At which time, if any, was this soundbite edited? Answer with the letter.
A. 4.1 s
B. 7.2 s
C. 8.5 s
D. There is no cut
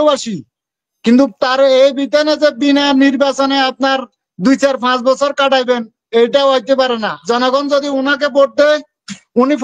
B